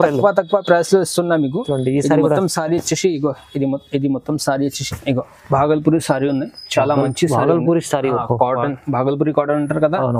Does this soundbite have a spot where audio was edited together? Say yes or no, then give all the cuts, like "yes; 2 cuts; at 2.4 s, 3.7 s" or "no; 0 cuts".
yes; 1 cut; at 4.9 s